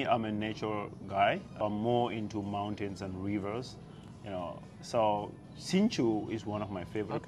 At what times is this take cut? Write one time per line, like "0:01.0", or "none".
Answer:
0:01.5